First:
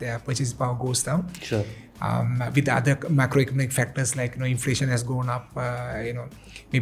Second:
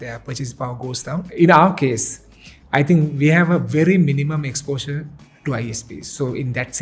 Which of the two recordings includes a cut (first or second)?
second